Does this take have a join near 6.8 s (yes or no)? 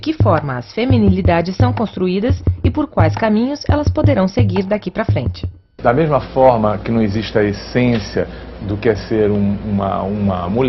no